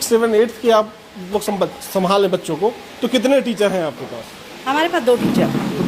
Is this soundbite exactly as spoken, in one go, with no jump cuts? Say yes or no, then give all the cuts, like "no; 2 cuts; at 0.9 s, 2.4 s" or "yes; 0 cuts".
yes; 0 cuts